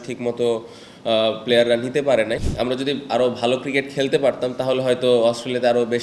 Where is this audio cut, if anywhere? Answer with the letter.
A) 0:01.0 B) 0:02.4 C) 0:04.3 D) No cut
B